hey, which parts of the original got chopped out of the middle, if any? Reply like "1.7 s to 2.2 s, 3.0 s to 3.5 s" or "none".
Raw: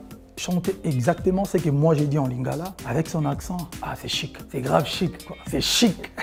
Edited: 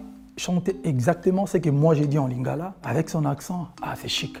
none